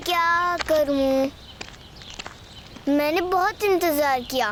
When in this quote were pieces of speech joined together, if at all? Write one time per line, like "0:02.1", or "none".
none